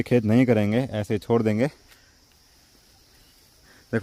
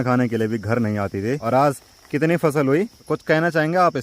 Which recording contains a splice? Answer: second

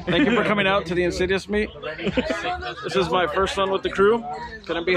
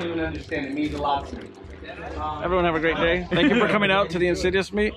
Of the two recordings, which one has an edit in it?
second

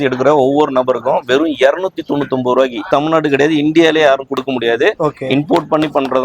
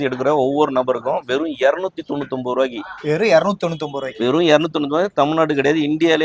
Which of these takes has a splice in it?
first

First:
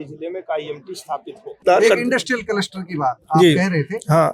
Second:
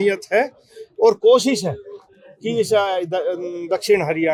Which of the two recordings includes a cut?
first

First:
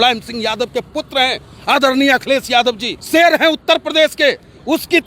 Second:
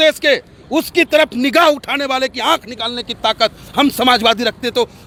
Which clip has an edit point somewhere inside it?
first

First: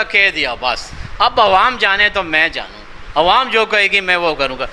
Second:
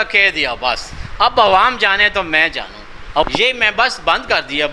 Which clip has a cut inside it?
second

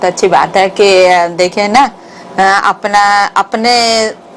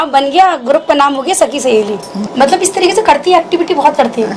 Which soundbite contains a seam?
second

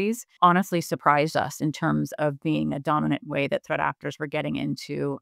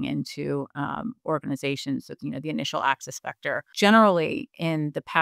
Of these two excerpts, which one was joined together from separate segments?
second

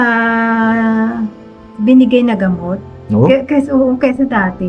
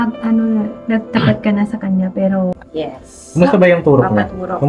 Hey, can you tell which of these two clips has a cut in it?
second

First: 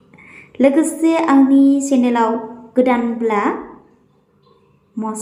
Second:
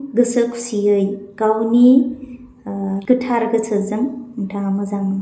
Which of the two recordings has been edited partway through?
second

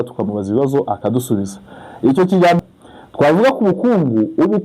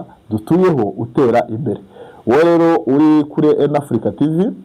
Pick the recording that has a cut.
first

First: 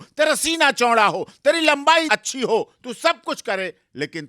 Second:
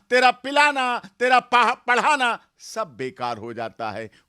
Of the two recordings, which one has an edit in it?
first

